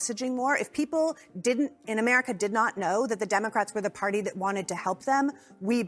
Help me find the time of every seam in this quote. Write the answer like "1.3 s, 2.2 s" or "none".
none